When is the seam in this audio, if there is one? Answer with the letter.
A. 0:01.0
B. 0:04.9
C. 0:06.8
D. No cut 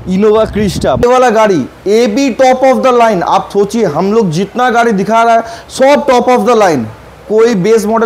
A